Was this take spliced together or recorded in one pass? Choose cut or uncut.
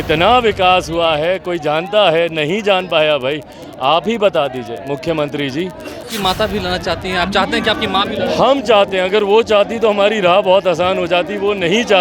cut